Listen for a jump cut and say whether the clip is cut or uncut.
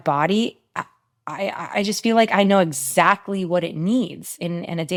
uncut